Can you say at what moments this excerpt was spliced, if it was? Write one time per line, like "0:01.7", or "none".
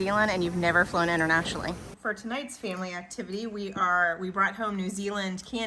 0:01.9